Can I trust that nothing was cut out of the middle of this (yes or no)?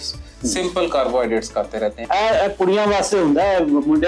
no